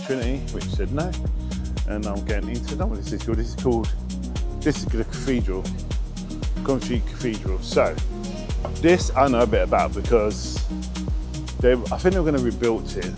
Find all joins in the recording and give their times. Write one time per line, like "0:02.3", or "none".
none